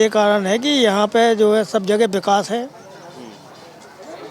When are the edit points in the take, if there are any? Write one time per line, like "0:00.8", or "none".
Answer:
none